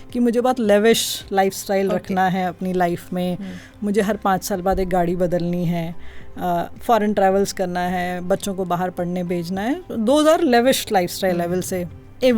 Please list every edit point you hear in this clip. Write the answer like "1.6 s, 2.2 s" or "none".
none